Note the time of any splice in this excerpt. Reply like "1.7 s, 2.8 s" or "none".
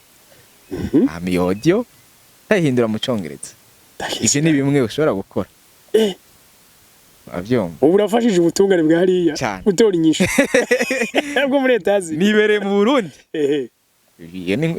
none